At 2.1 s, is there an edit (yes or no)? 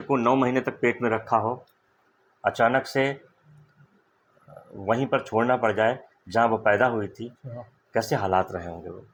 no